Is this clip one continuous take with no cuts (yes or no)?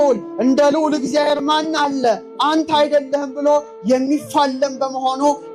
yes